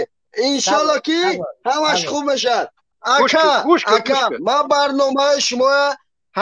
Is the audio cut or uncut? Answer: cut